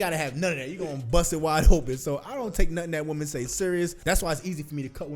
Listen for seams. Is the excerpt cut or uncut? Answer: cut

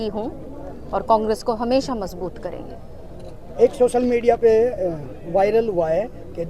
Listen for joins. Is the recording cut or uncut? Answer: uncut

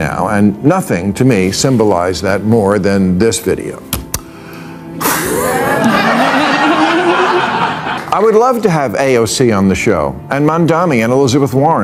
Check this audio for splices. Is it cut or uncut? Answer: cut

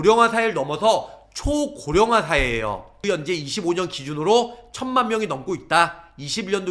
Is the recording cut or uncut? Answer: cut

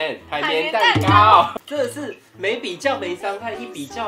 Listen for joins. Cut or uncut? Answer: cut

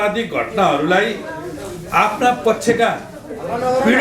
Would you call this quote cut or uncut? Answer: uncut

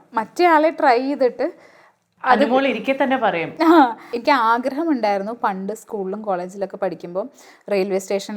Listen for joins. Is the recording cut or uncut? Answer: cut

